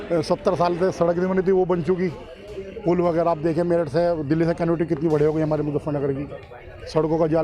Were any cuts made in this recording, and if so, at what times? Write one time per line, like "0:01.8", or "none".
none